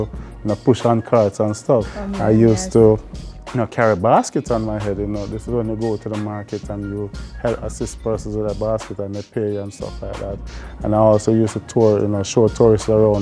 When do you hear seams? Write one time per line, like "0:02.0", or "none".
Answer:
0:01.9